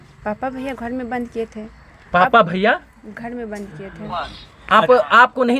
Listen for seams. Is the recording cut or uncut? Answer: uncut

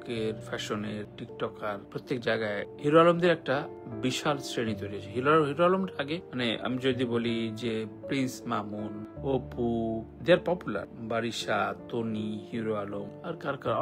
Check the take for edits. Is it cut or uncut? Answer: uncut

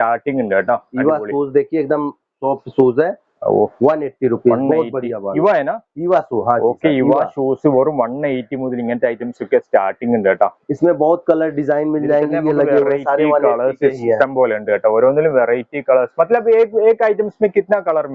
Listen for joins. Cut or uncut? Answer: uncut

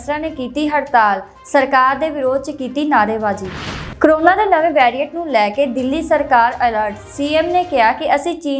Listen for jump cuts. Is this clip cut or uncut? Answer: cut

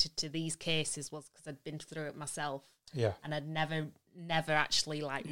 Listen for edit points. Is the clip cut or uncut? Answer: uncut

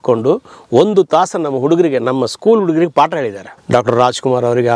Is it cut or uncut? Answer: cut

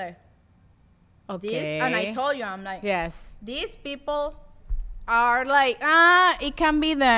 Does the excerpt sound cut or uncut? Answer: uncut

